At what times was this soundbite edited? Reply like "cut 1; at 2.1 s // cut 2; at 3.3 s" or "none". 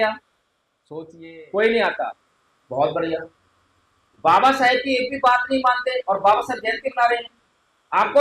cut 1; at 1.0 s